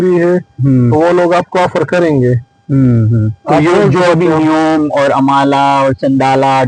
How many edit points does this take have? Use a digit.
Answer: 0